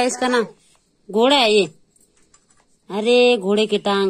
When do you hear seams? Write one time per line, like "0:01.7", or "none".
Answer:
none